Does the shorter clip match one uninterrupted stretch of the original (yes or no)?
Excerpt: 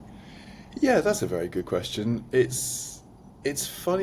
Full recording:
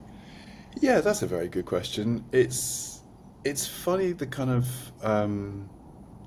yes